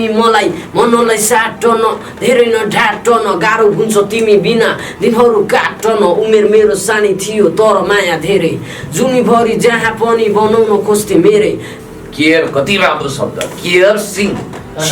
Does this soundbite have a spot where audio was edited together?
yes; 1 cut; at 11.7 s

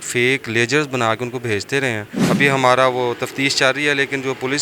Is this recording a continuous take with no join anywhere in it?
no; 1 cut; at 2.1 s

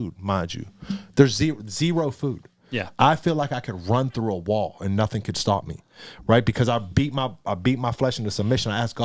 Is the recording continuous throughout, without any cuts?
yes; 0 cuts

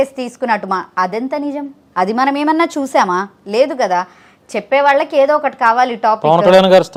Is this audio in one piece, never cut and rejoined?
yes; 0 cuts

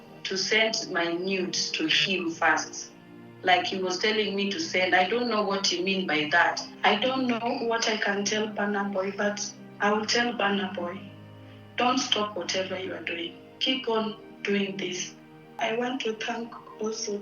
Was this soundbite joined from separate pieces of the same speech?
yes; 2 cuts; at 6.7 s, 15.6 s

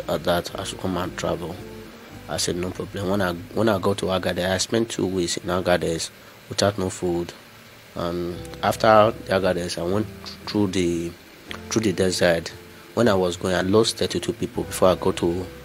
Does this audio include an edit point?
no; 0 cuts

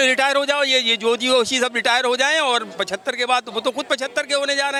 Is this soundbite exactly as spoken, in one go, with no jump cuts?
yes; 0 cuts

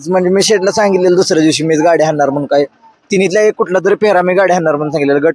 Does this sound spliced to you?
no; 0 cuts

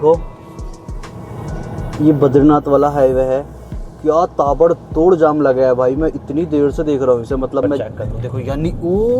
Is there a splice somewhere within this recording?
yes; 1 cut; at 7.8 s

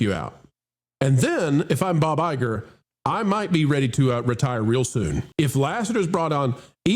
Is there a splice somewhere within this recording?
yes; 1 cut; at 5.2 s

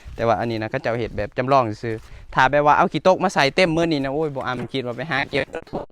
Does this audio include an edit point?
no; 0 cuts

